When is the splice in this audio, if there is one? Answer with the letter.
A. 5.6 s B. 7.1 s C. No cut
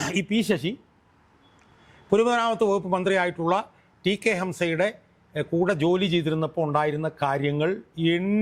C